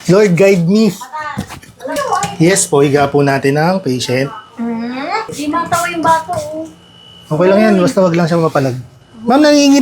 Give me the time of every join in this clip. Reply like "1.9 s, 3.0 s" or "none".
1.8 s, 5.3 s